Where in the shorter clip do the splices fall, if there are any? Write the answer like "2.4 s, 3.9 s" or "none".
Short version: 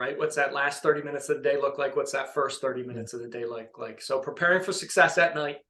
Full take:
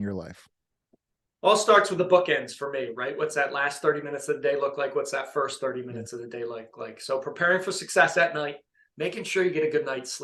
none